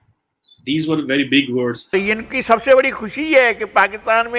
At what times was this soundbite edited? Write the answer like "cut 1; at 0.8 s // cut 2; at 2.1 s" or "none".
cut 1; at 2.3 s